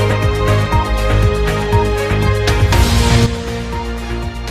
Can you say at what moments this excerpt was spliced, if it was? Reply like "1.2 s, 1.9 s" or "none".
2.6 s